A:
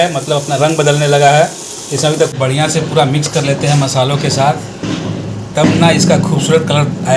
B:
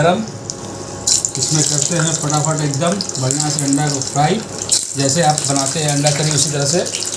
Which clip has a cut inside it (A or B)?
A